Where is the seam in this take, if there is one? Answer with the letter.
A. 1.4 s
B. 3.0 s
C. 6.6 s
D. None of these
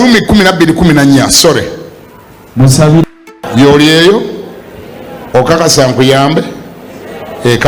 B